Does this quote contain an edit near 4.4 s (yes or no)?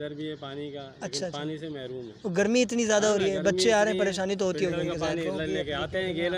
no